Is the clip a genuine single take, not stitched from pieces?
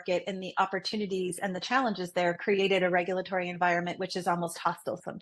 yes; 0 cuts

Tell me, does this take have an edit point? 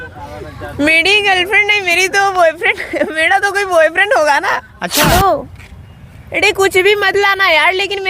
yes; 1 cut; at 4.8 s

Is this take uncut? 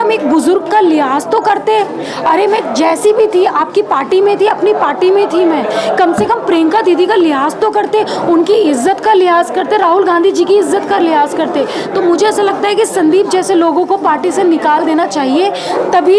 yes; 0 cuts

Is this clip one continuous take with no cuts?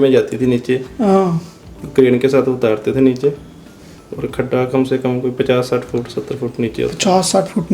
yes; 0 cuts

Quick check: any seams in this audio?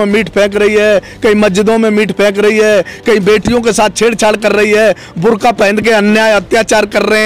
no; 0 cuts

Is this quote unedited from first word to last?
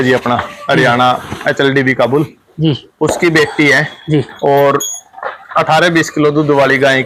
yes; 0 cuts

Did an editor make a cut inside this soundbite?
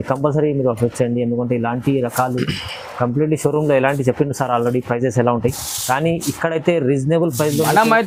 no; 0 cuts

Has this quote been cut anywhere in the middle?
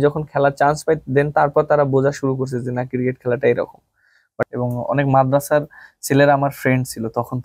yes; 1 cut; at 4.5 s

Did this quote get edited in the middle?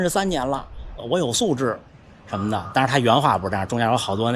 yes; 1 cut; at 1.0 s

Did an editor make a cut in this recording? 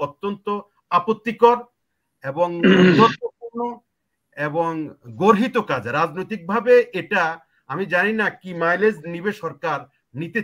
no; 0 cuts

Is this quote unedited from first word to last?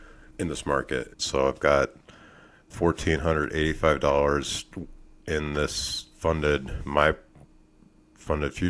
no; 1 cut; at 1.2 s

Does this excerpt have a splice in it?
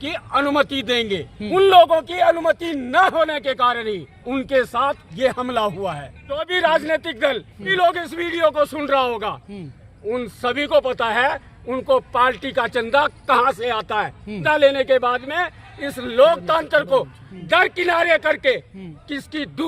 yes; 5 cuts; at 1.3 s, 4.2 s, 6.4 s, 7.7 s, 14.4 s

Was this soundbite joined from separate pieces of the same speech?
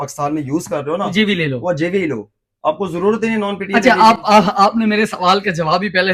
no; 0 cuts

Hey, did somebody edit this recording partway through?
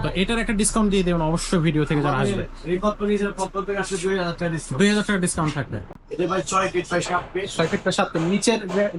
yes; 1 cut; at 6.0 s

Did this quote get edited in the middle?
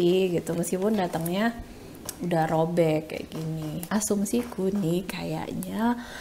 no; 0 cuts

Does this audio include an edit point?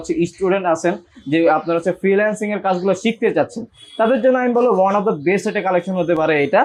no; 0 cuts

